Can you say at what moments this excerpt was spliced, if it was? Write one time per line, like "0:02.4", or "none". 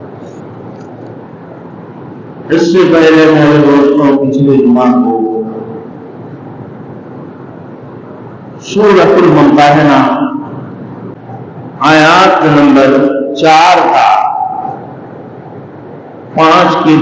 0:11.2

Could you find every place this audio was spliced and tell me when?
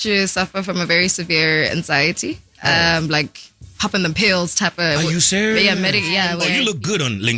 0:06.4

